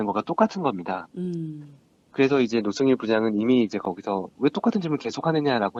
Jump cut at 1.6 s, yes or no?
no